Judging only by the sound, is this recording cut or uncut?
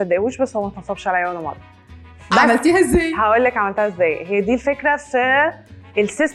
uncut